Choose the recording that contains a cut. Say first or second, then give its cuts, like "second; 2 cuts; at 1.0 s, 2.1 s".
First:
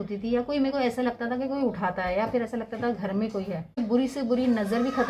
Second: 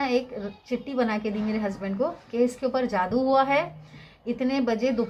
first; 1 cut; at 3.8 s